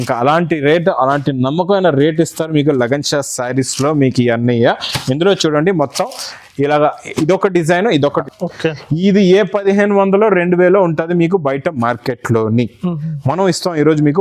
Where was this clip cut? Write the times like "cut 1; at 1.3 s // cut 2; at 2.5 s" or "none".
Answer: cut 1; at 8.3 s

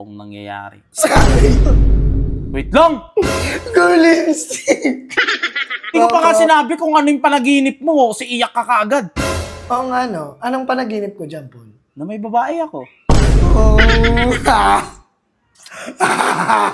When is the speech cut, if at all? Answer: cut 1; at 5.9 s

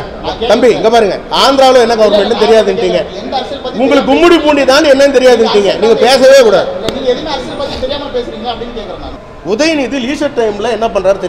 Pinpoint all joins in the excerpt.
cut 1; at 9.1 s

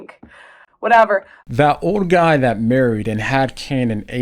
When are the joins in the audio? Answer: cut 1; at 1.5 s

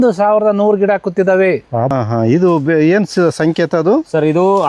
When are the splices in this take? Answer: cut 1; at 2.0 s

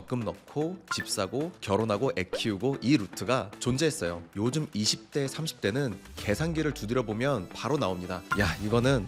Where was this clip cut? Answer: cut 1; at 4.3 s

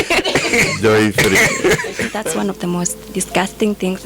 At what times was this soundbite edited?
cut 1; at 2.1 s

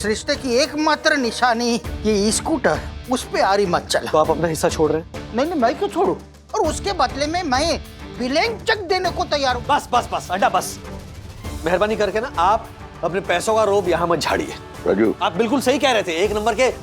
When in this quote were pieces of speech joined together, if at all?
cut 1; at 4.1 s // cut 2; at 6.3 s // cut 3; at 9.6 s // cut 4; at 15.0 s

